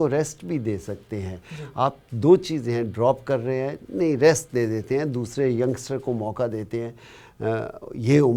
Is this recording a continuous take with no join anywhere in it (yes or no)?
yes